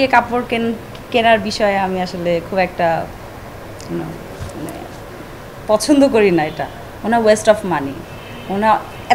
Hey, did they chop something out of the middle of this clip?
no; 0 cuts

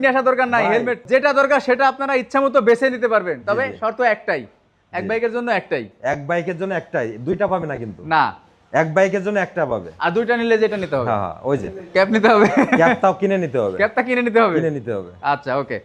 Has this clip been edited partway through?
no; 0 cuts

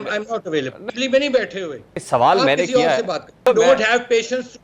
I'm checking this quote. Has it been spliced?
yes; 3 cuts; at 0.8 s, 1.9 s, 3.4 s

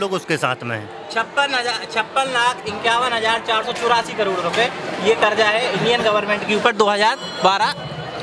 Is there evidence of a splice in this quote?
no; 0 cuts

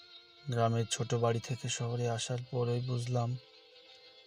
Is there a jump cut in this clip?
no; 0 cuts

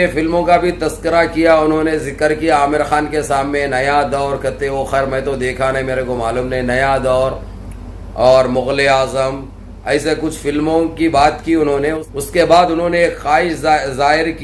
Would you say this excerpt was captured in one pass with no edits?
no; 1 cut; at 12.0 s

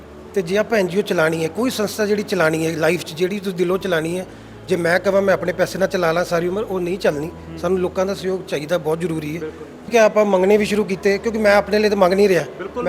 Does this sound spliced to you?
yes; 1 cut; at 9.9 s

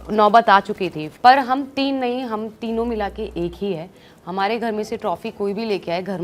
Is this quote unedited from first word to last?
no; 1 cut; at 1.0 s

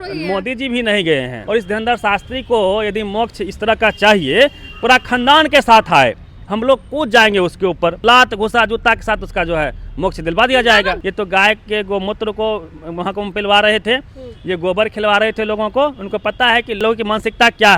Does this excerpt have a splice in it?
yes; 4 cuts; at 1.4 s, 8.0 s, 11.0 s, 16.8 s

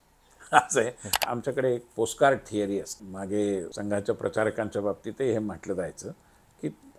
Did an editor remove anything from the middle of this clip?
yes; 3 cuts; at 1.2 s, 3.0 s, 3.7 s

